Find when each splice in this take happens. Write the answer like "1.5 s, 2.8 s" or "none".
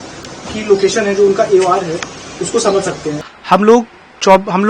3.2 s